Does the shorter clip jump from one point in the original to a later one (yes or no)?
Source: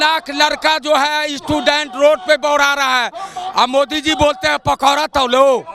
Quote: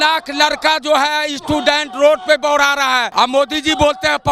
yes